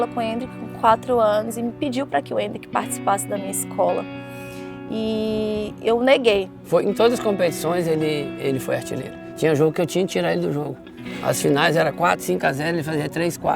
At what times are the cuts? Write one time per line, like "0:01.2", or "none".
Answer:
0:06.5